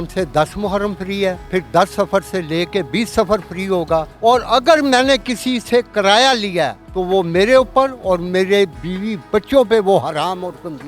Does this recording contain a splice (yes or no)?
yes